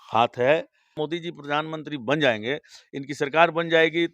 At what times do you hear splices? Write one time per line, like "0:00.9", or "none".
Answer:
0:00.9

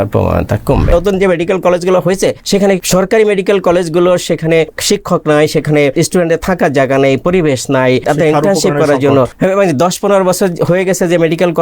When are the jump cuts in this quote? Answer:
0:00.9
0:02.6
0:04.8
0:05.9
0:08.0
0:09.3

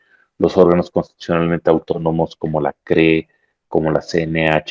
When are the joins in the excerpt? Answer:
none

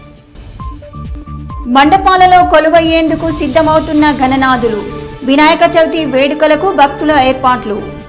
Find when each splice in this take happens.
0:01.0

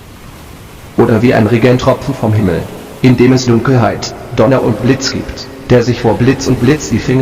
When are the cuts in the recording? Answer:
0:00.9

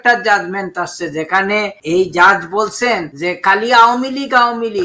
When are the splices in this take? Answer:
0:01.8
0:03.1

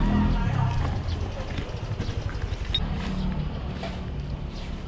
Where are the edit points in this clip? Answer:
0:02.8

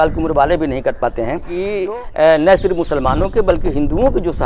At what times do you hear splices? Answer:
0:01.6

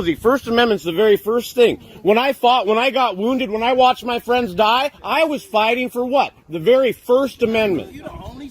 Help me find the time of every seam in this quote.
none

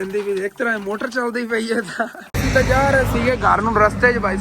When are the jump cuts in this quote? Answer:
0:02.2

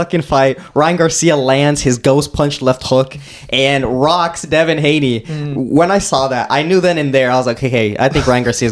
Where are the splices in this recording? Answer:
none

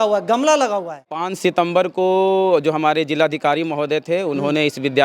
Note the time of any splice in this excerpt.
0:01.3

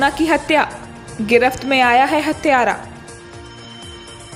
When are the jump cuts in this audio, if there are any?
none

